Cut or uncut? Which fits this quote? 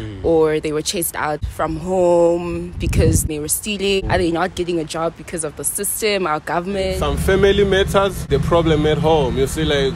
cut